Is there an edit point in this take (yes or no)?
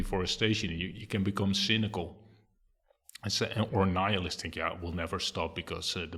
no